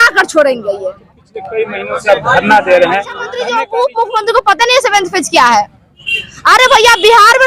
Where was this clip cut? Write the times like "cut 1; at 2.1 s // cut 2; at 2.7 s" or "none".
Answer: cut 1; at 3.3 s